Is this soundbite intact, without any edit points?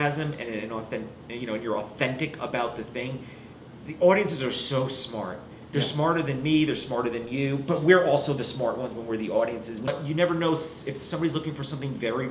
no; 1 cut; at 9.9 s

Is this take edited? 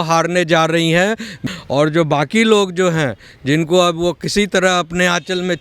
yes; 1 cut; at 1.4 s

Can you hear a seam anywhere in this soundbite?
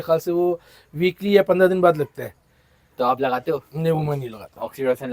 no; 0 cuts

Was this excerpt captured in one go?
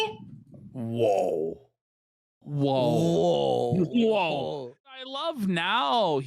no; 1 cut; at 5.0 s

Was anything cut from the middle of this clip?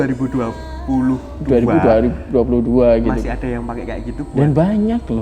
no; 0 cuts

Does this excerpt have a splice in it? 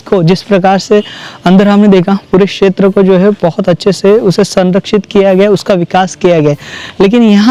no; 0 cuts

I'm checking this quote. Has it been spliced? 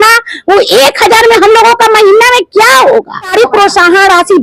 yes; 1 cut; at 3.3 s

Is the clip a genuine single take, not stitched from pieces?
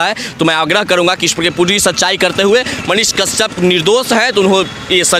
yes; 0 cuts

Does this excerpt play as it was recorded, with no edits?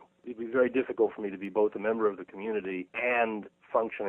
no; 1 cut; at 2.3 s

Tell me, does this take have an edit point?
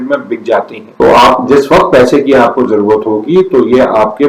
no; 0 cuts

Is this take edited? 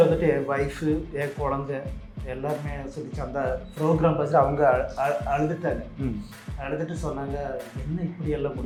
no; 0 cuts

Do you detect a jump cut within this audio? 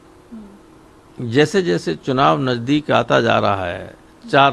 no; 0 cuts

